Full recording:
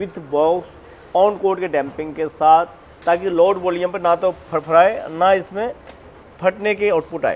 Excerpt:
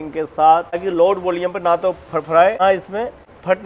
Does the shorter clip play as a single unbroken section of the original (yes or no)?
no